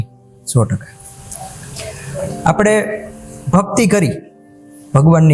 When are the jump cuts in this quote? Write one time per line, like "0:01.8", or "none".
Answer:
none